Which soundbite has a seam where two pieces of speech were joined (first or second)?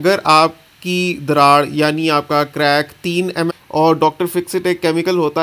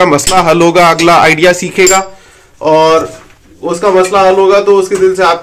first